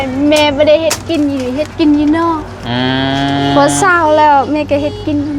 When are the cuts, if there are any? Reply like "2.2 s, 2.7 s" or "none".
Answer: none